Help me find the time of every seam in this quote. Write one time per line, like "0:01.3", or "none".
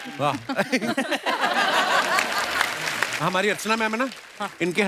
0:03.1